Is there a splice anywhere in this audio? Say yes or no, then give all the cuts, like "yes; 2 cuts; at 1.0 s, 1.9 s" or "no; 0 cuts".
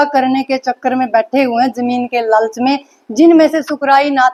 no; 0 cuts